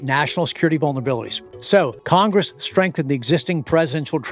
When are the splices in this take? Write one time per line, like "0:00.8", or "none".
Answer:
0:01.8